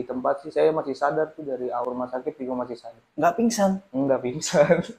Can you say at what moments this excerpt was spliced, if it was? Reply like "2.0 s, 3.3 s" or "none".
1.8 s